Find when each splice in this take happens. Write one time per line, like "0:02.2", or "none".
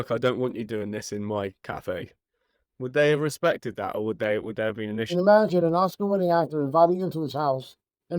0:05.1